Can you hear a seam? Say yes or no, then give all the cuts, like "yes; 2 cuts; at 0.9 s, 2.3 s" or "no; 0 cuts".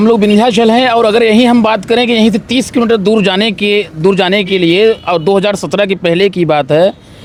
no; 0 cuts